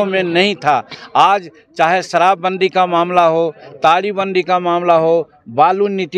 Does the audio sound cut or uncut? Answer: uncut